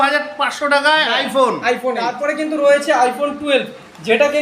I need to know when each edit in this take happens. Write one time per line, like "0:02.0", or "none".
0:02.1